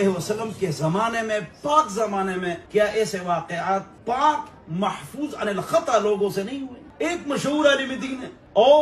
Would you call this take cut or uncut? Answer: uncut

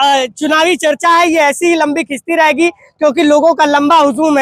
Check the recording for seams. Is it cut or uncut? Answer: uncut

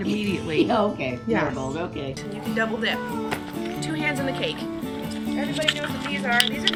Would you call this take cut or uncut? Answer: uncut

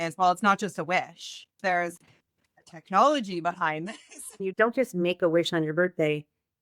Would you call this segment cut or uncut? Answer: cut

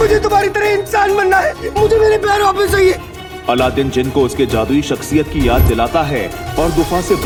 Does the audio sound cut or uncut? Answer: uncut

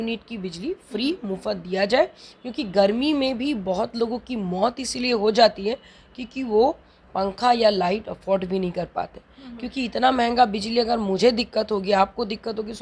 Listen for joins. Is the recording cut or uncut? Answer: uncut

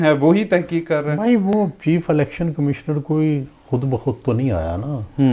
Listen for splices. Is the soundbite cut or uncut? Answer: uncut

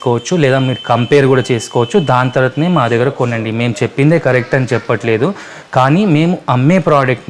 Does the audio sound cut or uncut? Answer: uncut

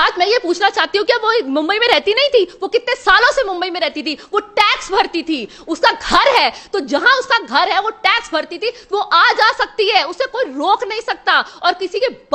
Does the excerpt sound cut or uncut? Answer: uncut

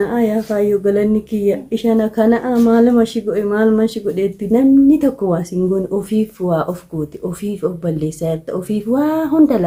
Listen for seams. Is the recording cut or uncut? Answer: uncut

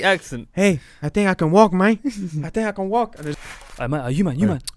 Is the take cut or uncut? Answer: cut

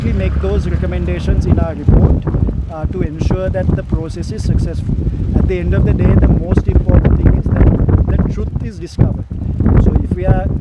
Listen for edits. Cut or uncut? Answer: uncut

